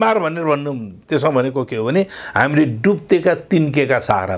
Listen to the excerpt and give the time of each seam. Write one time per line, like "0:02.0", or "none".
none

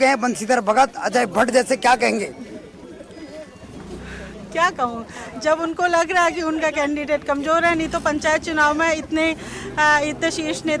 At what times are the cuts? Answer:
none

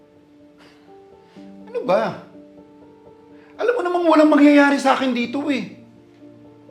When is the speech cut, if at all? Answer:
0:01.1
0:02.3
0:03.6

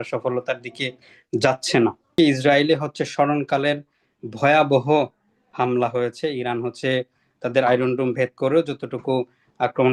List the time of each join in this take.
0:02.1

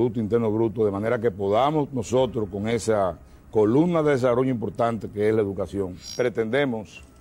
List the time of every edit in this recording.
0:06.0

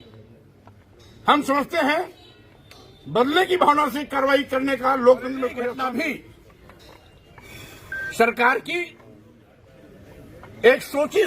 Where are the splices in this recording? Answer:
0:05.6

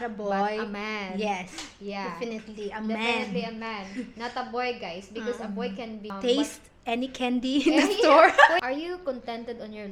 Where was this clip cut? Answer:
0:06.1
0:08.6

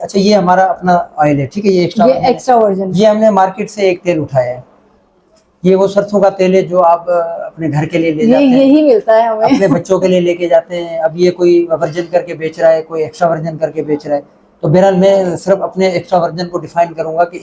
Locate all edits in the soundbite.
none

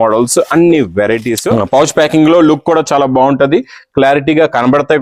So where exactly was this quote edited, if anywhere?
0:01.4

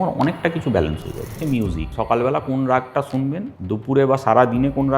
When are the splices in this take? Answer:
0:01.5
0:03.5

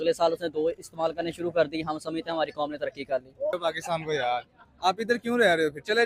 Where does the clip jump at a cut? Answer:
0:03.6

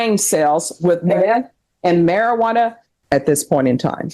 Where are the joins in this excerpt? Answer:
0:02.9

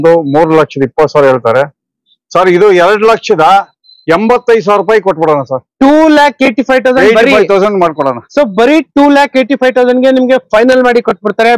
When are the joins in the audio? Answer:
none

